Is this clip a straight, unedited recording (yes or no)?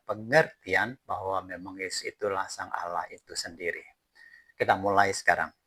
yes